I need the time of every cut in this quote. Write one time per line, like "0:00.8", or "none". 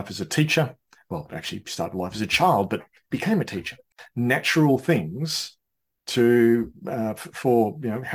0:04.0